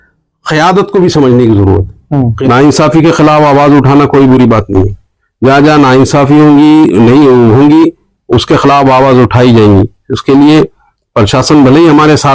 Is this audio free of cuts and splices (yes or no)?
no